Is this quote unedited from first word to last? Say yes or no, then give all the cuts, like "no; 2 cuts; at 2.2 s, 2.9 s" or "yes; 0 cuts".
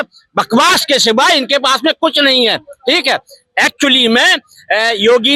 yes; 0 cuts